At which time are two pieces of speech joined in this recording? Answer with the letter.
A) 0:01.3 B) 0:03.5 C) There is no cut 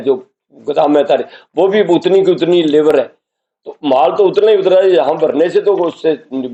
C